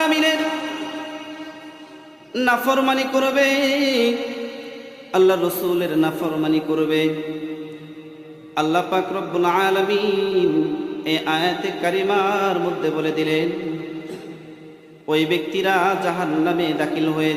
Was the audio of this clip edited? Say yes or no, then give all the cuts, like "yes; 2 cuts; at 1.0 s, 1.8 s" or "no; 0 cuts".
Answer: no; 0 cuts